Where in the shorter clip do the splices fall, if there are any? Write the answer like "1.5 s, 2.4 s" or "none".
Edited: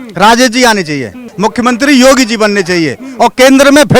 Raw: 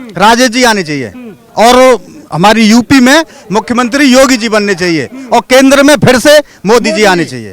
1.3 s